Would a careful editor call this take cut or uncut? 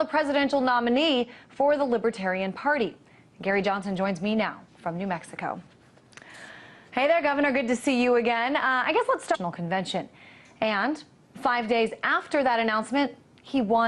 uncut